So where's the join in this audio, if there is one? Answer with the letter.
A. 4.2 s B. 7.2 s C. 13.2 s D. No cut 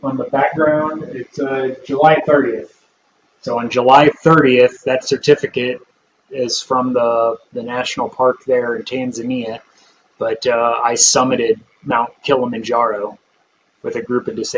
D